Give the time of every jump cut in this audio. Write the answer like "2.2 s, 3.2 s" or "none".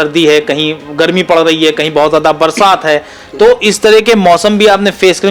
none

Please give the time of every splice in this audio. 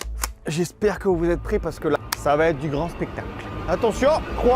2.0 s

